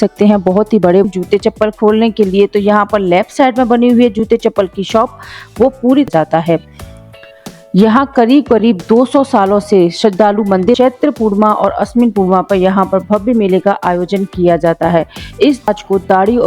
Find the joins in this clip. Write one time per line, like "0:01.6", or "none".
0:01.0
0:06.1
0:10.8
0:15.7